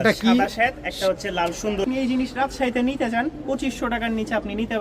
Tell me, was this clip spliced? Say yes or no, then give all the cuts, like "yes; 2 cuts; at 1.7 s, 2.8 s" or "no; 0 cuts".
yes; 1 cut; at 1.8 s